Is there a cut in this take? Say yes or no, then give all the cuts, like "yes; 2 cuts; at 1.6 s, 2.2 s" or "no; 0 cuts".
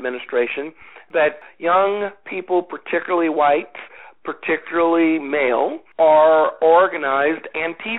yes; 2 cuts; at 1.3 s, 5.8 s